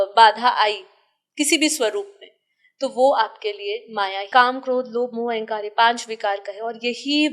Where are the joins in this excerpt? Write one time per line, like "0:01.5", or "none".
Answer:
0:04.3